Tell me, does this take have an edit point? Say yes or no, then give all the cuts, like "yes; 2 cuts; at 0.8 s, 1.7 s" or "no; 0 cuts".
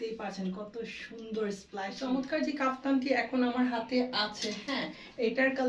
yes; 1 cut; at 1.9 s